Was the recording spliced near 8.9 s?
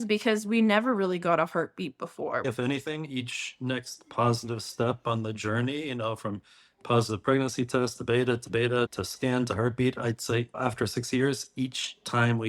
yes; 2 cuts; at 2.5 s, 8.9 s

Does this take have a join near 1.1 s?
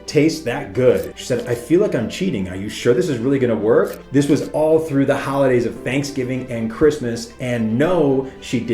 yes; 2 cuts; at 1.1 s, 4.0 s

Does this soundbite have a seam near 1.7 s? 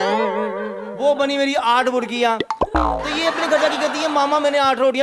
no; 0 cuts

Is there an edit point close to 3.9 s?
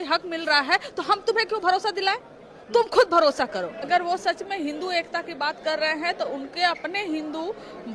yes; 1 cut; at 3.9 s

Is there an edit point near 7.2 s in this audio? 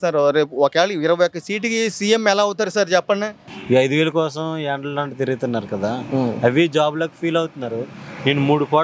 no; 1 cut; at 3.5 s

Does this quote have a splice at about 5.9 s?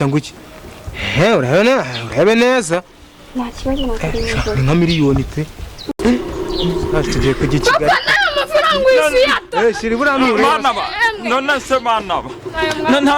yes; 1 cut; at 5.9 s

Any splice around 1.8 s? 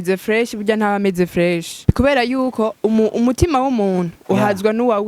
yes; 1 cut; at 1.8 s

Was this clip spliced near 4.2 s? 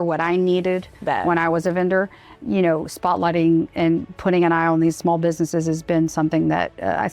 no; 2 cuts; at 0.9 s, 2.4 s

